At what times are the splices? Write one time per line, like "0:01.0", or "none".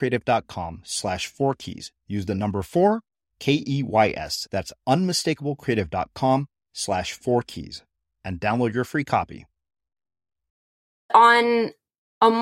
0:11.1